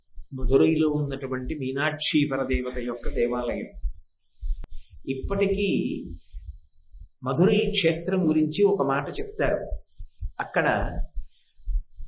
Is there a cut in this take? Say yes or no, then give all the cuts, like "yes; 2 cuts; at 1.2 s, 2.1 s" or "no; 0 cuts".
yes; 1 cut; at 4.7 s